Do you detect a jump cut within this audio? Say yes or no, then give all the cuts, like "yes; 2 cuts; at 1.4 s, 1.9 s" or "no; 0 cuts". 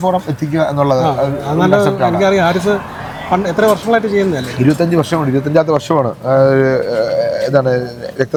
no; 0 cuts